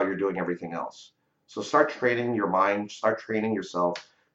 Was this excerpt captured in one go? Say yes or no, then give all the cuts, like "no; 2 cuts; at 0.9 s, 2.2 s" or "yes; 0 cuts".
yes; 0 cuts